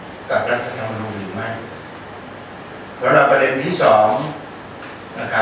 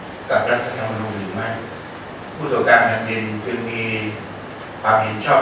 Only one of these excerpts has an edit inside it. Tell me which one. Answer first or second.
second